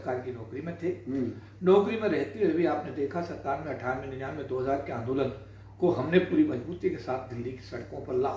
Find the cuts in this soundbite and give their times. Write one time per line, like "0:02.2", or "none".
none